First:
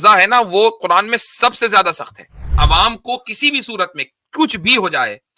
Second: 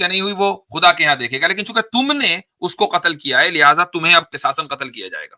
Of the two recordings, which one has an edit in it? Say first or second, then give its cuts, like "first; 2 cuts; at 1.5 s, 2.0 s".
first; 1 cut; at 2.4 s